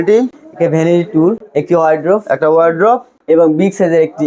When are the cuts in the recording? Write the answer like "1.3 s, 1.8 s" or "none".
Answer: 1.4 s